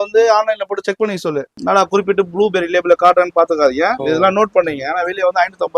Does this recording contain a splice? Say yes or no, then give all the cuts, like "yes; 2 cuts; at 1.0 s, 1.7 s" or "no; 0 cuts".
yes; 2 cuts; at 1.5 s, 4.0 s